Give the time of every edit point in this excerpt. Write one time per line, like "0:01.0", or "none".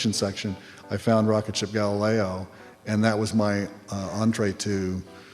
none